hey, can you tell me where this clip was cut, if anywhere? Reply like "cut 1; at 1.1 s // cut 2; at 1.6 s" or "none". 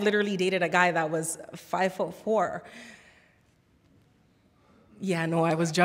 none